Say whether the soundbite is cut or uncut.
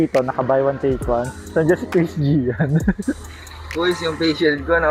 cut